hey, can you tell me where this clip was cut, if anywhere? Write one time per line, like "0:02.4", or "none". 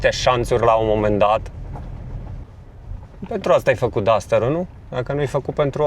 0:02.5